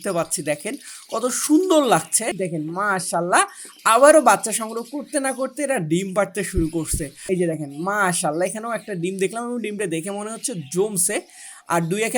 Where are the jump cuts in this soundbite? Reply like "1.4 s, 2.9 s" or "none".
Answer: 2.4 s, 7.2 s